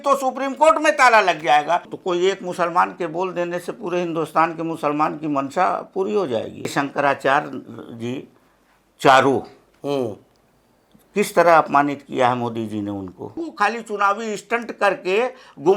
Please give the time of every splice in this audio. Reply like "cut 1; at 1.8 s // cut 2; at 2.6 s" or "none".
cut 1; at 1.9 s // cut 2; at 6.7 s // cut 3; at 13.4 s